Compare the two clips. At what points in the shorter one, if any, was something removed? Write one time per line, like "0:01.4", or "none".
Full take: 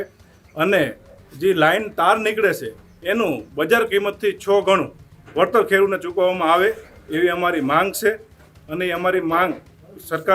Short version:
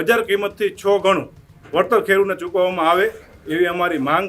none